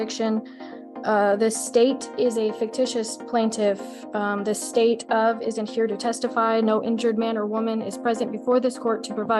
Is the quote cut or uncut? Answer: uncut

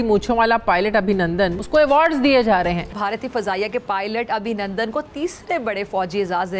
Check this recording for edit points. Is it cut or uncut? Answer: cut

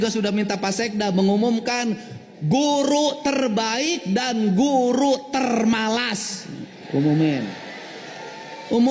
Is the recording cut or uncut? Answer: uncut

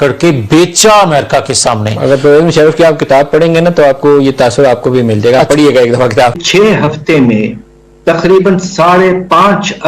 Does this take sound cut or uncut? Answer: cut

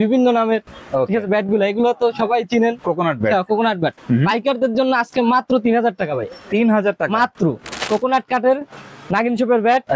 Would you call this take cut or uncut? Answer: cut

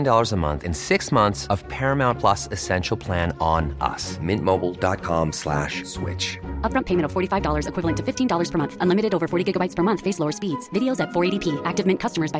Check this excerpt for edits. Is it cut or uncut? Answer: uncut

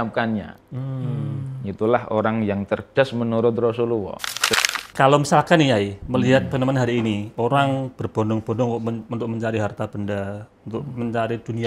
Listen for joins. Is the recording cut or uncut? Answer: cut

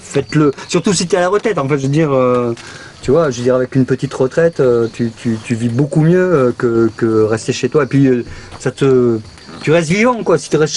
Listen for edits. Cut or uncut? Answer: uncut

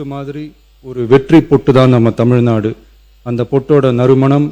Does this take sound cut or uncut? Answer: uncut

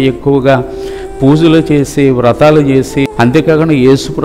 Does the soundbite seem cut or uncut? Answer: cut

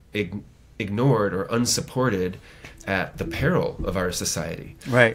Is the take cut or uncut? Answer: uncut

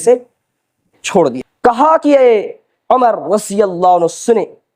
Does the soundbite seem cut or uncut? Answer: cut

